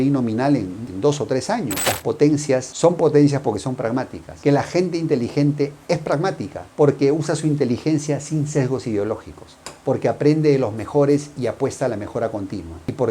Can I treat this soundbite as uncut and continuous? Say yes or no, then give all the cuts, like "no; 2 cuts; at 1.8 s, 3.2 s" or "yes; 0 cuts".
no; 1 cut; at 1.9 s